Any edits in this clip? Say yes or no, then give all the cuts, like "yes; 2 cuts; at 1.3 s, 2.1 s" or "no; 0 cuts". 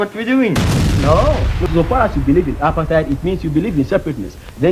yes; 1 cut; at 1.6 s